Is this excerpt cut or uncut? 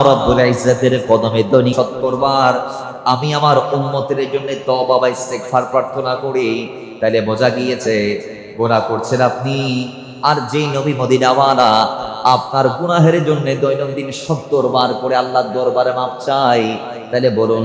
cut